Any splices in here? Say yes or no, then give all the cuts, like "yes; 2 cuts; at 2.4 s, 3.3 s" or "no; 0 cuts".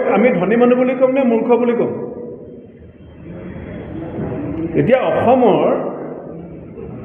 no; 0 cuts